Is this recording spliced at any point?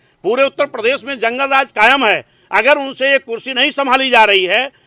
no; 0 cuts

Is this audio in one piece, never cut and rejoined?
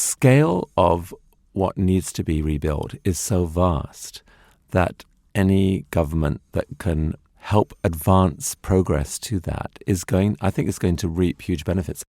no; 1 cut; at 7.3 s

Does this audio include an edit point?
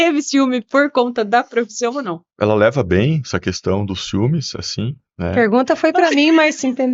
yes; 1 cut; at 2.3 s

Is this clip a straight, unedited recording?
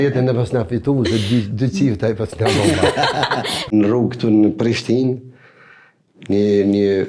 no; 1 cut; at 3.7 s

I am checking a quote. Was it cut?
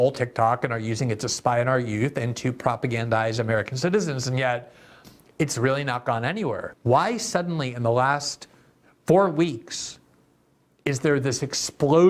yes; 1 cut; at 6.7 s

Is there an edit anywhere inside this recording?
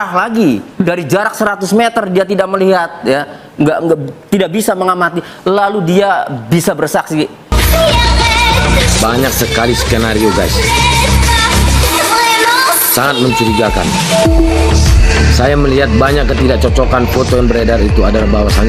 yes; 1 cut; at 7.5 s

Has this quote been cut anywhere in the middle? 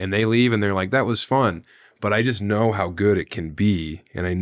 no; 0 cuts

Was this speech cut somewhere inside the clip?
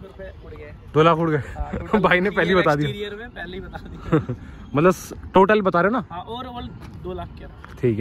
no; 0 cuts

